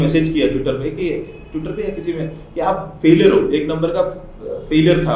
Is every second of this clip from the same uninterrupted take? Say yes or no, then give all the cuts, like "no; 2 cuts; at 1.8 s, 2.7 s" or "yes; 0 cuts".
yes; 0 cuts